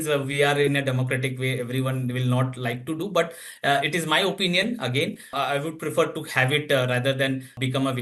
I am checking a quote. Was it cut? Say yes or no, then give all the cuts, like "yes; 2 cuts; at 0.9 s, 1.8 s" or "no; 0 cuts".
no; 0 cuts